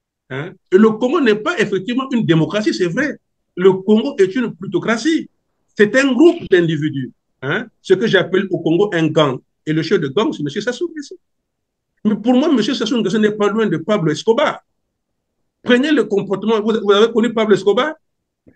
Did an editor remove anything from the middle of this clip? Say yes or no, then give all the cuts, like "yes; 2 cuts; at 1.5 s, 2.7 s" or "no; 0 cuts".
no; 0 cuts